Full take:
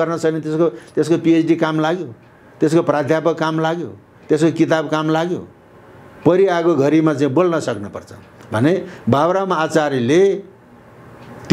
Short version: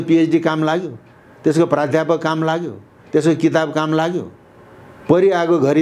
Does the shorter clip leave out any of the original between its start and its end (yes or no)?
no